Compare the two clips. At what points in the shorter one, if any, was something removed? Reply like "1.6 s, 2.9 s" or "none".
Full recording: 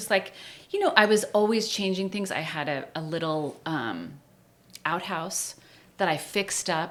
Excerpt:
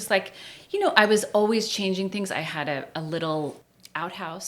3.6 s